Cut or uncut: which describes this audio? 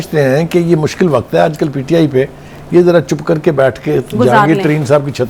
uncut